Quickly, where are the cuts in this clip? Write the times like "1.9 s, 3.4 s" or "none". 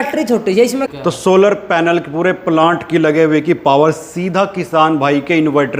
0.9 s